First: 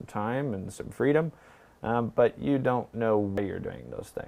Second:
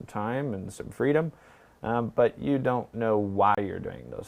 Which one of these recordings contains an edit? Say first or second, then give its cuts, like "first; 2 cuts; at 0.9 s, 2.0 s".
first; 1 cut; at 3.4 s